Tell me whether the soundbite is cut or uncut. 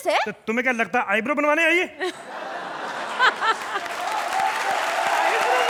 uncut